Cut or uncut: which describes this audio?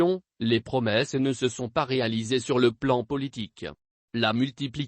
cut